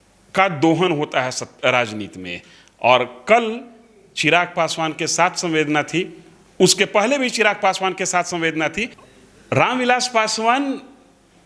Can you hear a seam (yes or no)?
yes